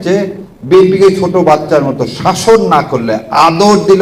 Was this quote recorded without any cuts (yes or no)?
yes